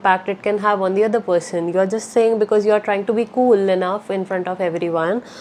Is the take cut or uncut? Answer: uncut